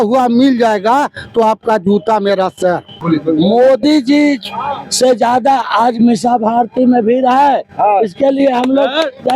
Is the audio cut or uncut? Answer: cut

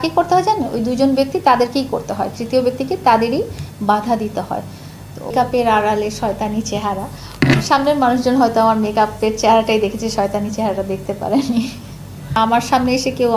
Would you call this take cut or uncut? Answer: cut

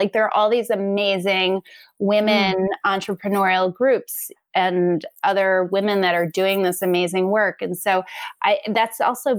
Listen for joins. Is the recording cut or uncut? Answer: uncut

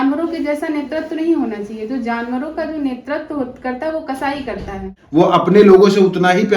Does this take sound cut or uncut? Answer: cut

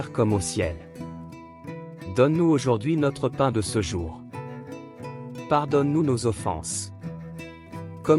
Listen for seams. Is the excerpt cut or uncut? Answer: cut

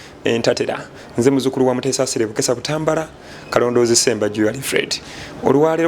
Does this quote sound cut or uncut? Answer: uncut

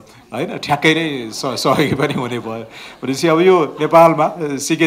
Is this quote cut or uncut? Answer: uncut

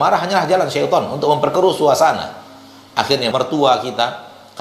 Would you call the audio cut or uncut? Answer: cut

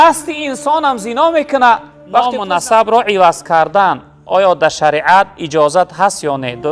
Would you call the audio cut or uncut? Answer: cut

